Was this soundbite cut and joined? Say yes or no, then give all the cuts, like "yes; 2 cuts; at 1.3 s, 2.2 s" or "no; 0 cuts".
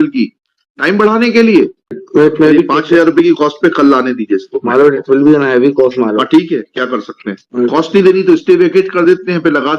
yes; 2 cuts; at 2.0 s, 7.4 s